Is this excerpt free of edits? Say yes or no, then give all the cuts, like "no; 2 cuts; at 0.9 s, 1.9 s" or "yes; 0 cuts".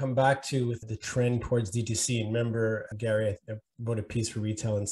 no; 1 cut; at 0.9 s